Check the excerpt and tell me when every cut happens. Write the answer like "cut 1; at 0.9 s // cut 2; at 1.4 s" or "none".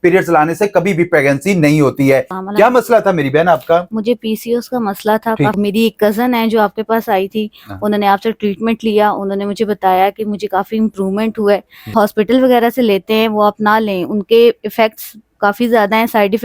cut 1; at 2.3 s // cut 2; at 5.5 s // cut 3; at 11.9 s